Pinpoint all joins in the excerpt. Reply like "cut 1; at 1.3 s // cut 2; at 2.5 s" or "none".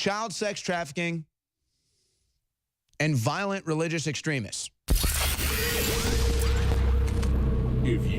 cut 1; at 5.0 s